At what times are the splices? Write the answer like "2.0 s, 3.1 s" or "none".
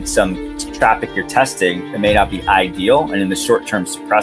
none